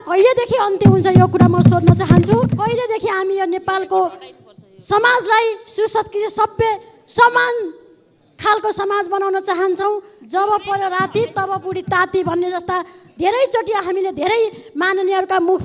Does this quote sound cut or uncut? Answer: cut